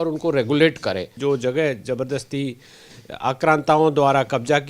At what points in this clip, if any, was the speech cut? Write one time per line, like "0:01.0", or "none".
0:01.1